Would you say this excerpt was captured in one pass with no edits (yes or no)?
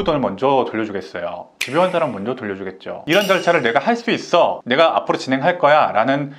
no